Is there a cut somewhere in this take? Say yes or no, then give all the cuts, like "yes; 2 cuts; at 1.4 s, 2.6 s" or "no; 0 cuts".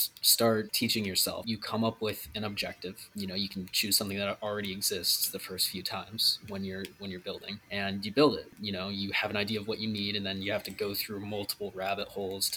yes; 4 cuts; at 1.3 s, 3.0 s, 7.6 s, 8.6 s